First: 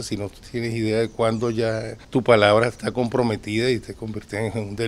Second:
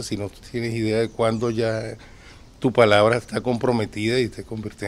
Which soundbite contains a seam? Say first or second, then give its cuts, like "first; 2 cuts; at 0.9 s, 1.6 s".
first; 1 cut; at 1.9 s